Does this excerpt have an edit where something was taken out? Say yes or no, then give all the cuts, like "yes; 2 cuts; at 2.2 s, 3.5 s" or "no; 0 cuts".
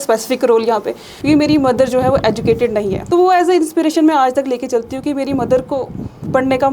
yes; 2 cuts; at 1.1 s, 3.0 s